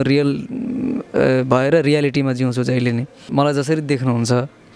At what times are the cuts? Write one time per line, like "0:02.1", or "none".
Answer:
0:03.2